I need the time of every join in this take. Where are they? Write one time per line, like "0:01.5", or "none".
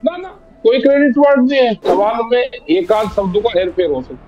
0:01.8